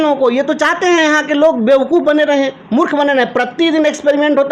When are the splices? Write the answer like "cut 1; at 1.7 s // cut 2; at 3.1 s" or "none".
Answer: none